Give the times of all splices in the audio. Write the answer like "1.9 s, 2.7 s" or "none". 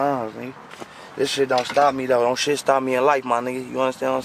none